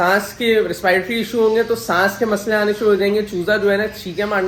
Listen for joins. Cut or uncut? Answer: uncut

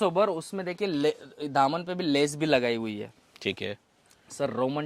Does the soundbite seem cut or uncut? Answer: uncut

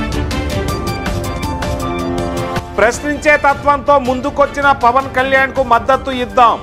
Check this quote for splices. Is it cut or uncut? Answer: cut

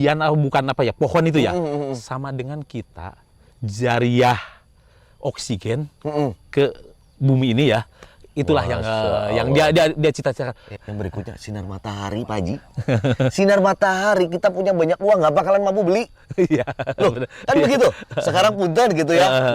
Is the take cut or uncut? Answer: cut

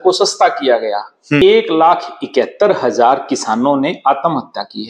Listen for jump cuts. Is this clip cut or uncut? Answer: cut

